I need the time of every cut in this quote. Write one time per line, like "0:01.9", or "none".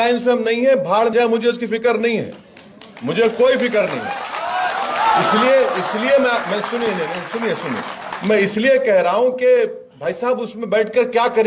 0:01.1